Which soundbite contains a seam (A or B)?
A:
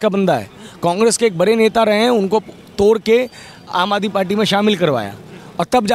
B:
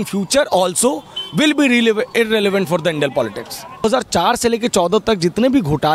B